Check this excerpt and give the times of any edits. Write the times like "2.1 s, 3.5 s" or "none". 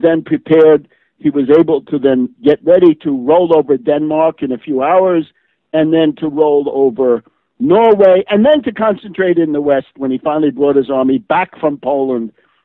none